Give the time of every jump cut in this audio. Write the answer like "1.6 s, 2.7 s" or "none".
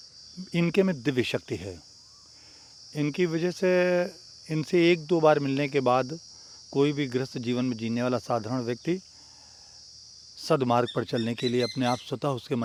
none